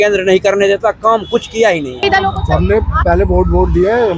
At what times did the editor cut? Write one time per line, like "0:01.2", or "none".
0:02.0